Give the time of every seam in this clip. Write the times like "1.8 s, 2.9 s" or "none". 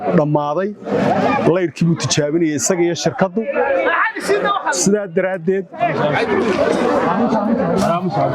none

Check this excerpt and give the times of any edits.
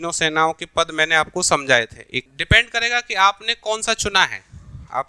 2.2 s

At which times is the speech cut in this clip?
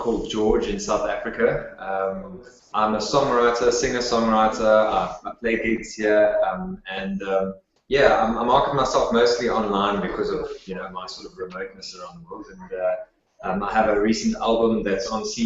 2.8 s

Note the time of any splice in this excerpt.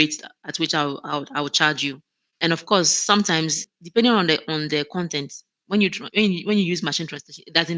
2.3 s, 3.6 s

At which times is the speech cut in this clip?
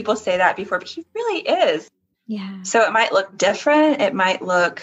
2.0 s

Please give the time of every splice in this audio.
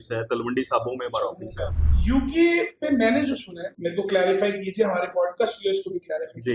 1.8 s, 3.6 s

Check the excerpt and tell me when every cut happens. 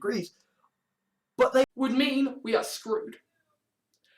1.6 s

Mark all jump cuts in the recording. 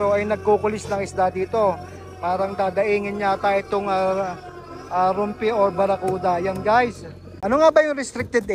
7.3 s

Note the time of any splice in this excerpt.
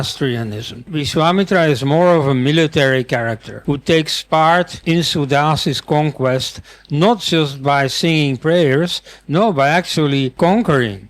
1.0 s, 3.5 s, 4.8 s, 10.3 s

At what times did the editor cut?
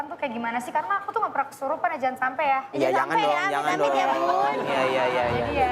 none

